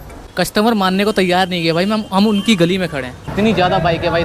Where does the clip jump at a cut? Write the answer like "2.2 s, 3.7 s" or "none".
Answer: 3.2 s